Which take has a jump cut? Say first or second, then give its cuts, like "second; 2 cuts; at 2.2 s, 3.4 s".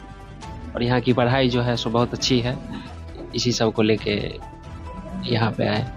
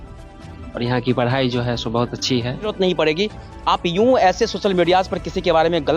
second; 1 cut; at 2.7 s